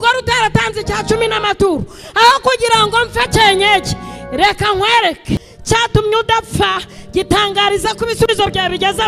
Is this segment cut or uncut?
cut